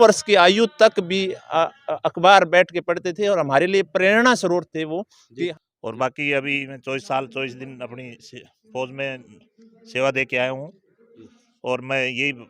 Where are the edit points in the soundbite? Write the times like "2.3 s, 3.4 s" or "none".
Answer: 5.5 s